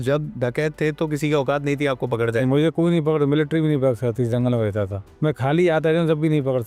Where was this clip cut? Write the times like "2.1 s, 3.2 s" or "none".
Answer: none